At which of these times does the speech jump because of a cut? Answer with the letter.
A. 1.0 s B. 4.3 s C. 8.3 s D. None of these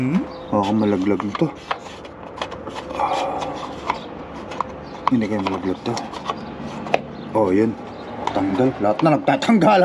C